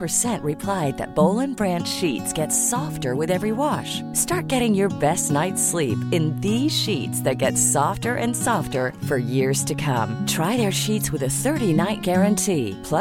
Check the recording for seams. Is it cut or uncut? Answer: uncut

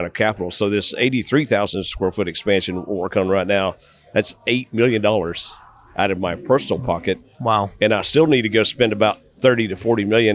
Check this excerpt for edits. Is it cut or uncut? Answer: uncut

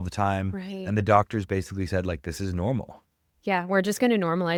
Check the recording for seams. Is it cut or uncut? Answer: uncut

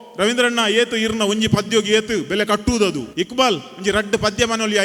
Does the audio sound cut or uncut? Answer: cut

